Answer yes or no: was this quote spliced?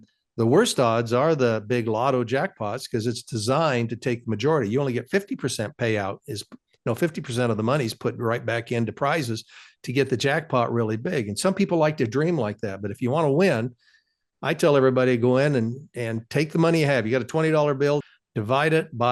yes